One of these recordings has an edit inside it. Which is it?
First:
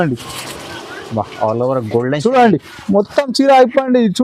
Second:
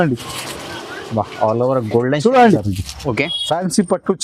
second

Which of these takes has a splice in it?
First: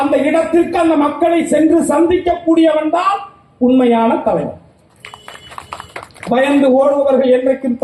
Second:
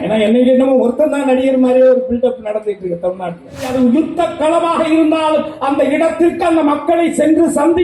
second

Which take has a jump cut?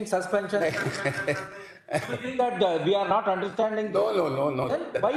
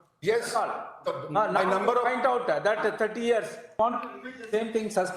second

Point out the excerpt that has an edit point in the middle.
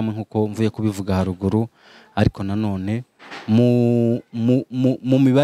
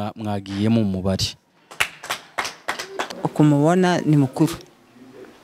second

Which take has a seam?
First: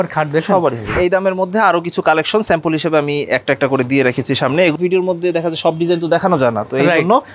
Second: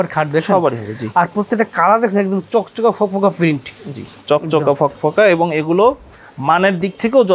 first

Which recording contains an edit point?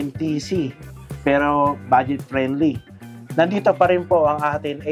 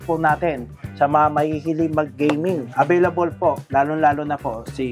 second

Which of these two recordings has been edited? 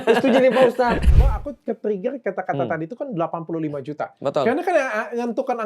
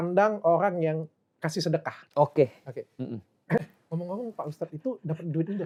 first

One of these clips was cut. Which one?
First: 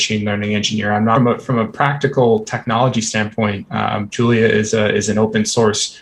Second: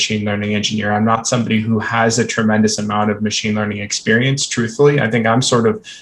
first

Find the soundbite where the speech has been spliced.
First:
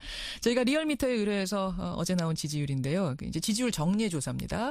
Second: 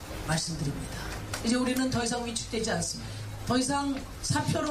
first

